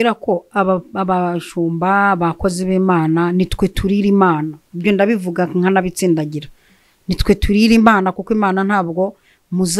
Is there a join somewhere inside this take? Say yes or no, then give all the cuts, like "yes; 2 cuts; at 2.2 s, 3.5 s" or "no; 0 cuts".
no; 0 cuts